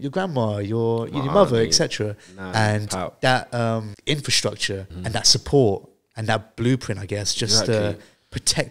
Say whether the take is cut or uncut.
cut